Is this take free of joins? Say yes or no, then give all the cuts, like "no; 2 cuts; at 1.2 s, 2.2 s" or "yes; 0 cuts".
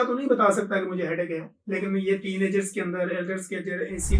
yes; 0 cuts